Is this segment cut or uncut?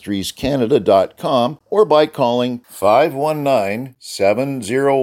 cut